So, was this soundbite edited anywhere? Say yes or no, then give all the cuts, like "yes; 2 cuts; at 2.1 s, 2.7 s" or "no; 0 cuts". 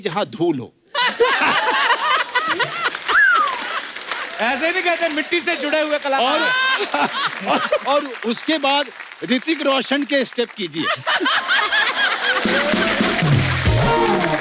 no; 0 cuts